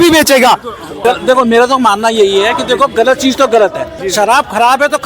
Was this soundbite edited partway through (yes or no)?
yes